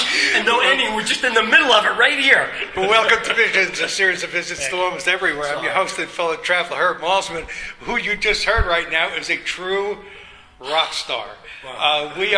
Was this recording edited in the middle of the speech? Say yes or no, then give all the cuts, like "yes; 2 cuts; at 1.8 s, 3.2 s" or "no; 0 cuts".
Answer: no; 0 cuts